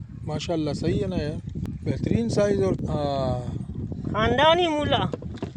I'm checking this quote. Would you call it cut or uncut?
cut